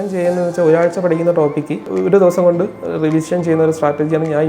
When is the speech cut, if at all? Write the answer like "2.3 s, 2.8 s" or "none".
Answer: 1.9 s